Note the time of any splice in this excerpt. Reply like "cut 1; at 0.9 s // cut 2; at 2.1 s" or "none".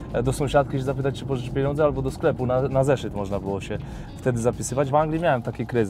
cut 1; at 4.9 s